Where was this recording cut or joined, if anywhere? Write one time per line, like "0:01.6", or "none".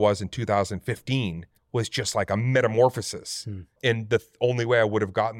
0:01.5
0:03.7